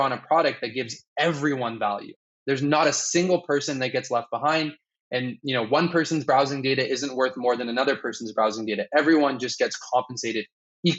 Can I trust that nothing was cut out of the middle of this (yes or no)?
yes